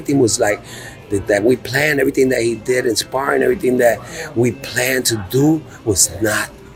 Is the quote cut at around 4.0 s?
no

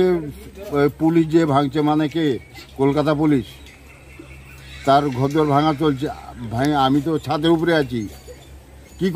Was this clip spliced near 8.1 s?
no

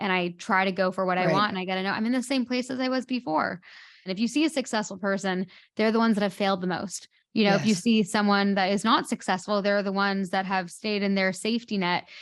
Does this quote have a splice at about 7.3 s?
no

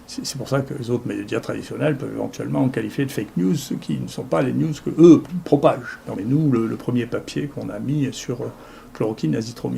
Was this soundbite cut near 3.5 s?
no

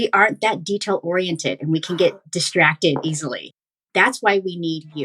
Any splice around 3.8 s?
yes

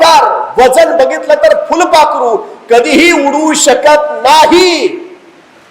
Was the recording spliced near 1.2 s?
no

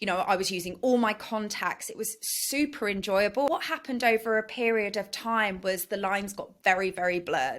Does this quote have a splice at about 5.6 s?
no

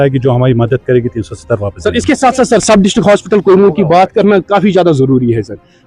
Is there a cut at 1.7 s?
no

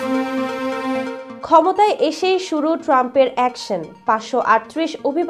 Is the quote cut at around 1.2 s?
yes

